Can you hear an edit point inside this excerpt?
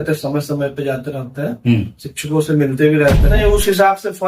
yes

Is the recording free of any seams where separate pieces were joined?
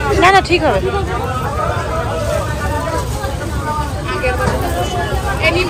yes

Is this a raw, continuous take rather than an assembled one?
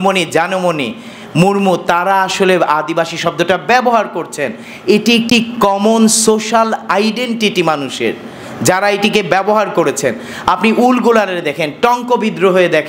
yes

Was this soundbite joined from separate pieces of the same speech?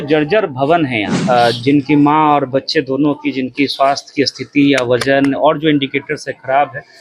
yes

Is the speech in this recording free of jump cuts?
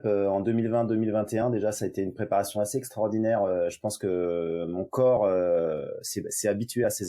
yes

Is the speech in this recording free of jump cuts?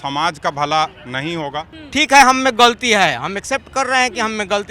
no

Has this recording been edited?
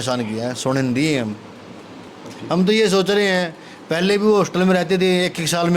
yes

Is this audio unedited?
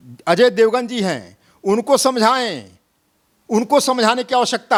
yes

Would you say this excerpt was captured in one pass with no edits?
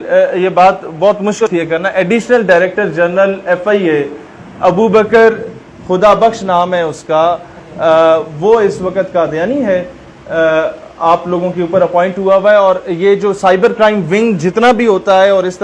no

